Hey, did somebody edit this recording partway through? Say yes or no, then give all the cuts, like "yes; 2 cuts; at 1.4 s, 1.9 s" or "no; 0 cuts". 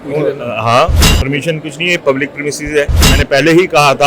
yes; 1 cut; at 3.1 s